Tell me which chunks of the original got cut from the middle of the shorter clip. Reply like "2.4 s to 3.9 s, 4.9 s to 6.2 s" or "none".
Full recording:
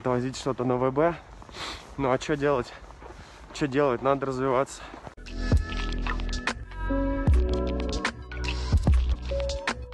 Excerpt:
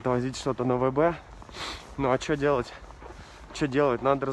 none